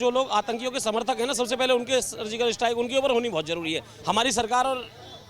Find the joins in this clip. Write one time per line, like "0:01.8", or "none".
0:03.9